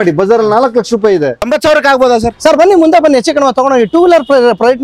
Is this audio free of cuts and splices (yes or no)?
no